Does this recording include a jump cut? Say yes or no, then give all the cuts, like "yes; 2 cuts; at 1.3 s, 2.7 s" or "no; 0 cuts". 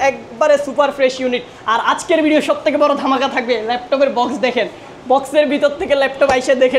no; 0 cuts